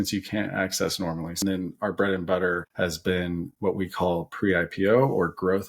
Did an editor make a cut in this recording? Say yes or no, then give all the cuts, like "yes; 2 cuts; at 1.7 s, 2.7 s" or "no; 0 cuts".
yes; 1 cut; at 1.4 s